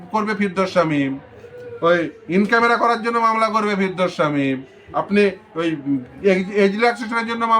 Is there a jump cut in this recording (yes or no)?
no